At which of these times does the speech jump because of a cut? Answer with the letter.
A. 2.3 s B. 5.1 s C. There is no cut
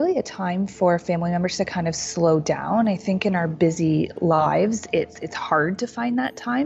C